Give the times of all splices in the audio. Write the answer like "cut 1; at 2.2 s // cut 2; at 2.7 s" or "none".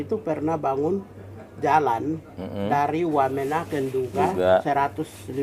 none